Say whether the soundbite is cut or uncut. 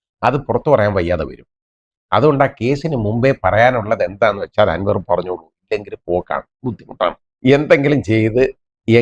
cut